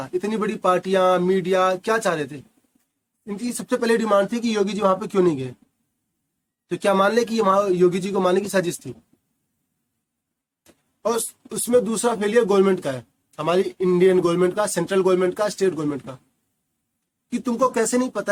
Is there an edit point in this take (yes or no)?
no